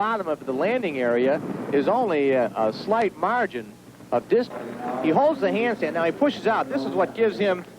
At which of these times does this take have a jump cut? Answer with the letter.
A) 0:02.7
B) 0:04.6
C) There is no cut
B